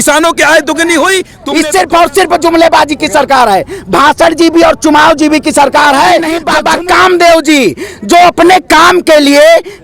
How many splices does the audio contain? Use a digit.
2